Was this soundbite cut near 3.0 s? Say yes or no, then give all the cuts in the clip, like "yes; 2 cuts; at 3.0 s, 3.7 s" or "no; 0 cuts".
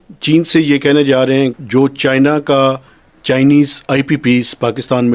no; 1 cut; at 1.6 s